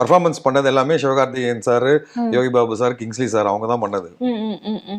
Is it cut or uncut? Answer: uncut